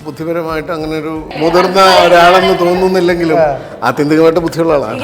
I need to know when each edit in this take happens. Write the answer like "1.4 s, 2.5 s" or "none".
1.4 s